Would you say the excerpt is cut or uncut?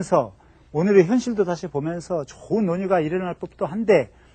cut